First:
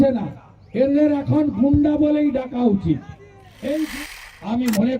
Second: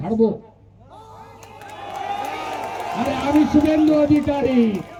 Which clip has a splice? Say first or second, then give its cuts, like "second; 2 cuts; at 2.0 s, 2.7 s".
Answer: first; 1 cut; at 3.7 s